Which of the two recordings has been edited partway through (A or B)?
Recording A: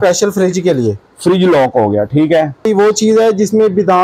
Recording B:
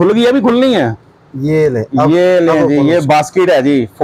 A